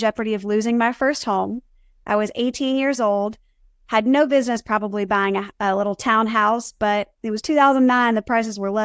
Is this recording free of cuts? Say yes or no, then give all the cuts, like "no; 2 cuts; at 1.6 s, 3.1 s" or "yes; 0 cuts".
yes; 0 cuts